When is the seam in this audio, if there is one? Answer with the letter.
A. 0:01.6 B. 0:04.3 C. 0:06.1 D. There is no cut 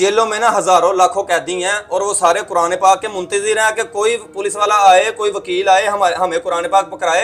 D